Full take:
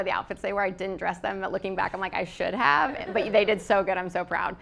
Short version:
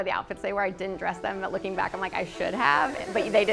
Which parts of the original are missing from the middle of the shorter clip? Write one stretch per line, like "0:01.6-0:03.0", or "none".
none